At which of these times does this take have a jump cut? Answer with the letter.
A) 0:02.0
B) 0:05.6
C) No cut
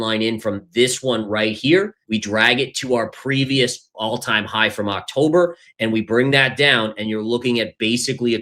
A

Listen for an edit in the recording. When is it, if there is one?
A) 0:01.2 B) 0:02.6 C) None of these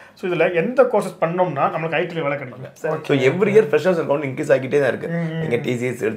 B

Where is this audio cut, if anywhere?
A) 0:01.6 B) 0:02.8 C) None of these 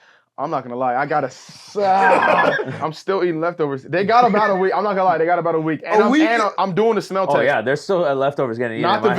B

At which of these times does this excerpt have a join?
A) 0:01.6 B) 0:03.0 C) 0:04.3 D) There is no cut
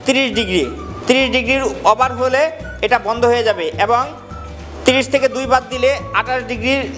D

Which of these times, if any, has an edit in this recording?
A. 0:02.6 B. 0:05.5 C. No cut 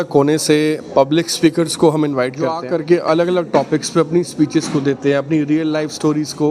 A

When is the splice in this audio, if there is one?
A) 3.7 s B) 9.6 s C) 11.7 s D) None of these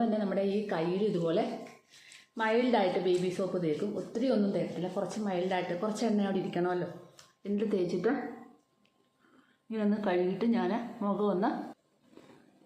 C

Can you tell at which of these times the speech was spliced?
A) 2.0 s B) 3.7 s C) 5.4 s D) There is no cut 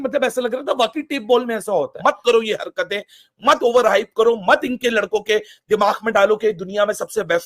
A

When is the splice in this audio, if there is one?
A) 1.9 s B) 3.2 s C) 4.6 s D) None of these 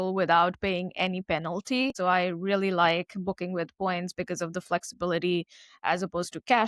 A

